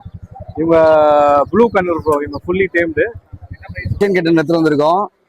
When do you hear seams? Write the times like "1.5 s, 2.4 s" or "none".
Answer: 4.0 s